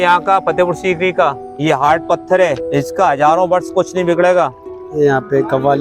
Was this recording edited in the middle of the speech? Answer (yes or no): yes